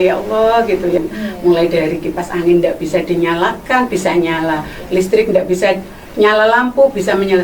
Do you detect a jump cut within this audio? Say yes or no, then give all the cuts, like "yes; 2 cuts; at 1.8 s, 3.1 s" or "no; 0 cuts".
yes; 1 cut; at 1.0 s